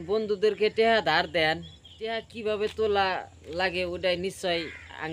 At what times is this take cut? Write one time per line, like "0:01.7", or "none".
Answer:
0:02.3